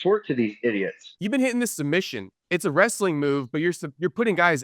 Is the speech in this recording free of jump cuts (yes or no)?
no